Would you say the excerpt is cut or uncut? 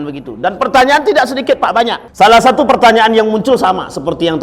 cut